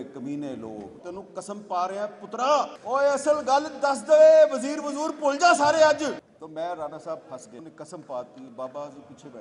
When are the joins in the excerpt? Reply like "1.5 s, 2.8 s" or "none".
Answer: 1.0 s, 2.8 s, 6.2 s, 7.6 s